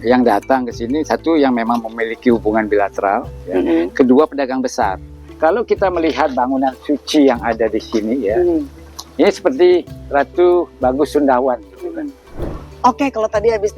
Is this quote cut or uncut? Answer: cut